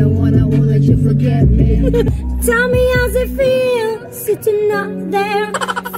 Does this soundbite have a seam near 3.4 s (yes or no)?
no